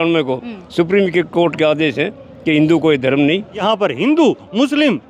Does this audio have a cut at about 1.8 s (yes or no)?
no